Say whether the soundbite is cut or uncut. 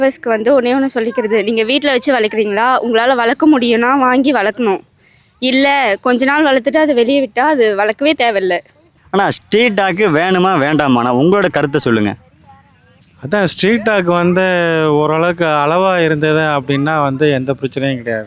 uncut